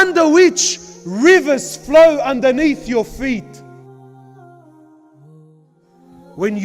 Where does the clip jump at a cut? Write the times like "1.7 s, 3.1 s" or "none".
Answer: 5.4 s